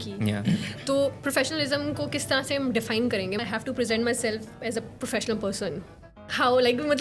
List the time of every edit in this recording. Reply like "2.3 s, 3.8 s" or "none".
3.4 s